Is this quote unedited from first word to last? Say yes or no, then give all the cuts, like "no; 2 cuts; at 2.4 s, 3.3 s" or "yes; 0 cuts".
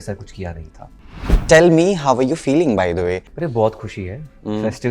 no; 2 cuts; at 1.3 s, 3.3 s